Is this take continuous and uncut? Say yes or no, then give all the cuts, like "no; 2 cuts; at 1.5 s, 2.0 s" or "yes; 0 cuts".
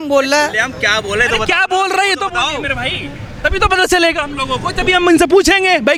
yes; 0 cuts